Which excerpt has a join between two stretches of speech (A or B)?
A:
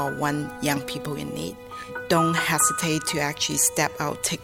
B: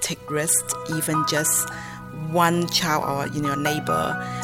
A